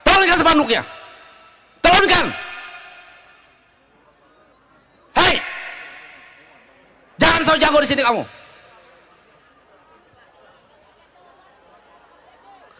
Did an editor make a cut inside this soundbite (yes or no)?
no